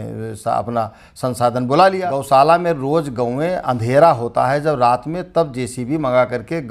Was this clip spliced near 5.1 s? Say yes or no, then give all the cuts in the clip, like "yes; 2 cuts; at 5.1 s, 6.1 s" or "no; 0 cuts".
no; 1 cut; at 2.1 s